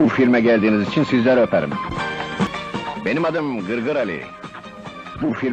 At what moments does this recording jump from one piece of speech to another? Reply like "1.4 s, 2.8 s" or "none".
1.0 s, 2.5 s